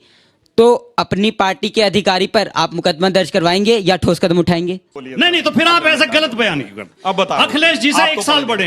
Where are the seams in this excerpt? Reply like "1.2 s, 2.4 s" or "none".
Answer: 5.0 s